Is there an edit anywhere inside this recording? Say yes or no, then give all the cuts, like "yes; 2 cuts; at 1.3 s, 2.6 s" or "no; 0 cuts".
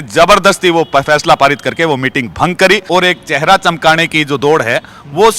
yes; 1 cut; at 2.8 s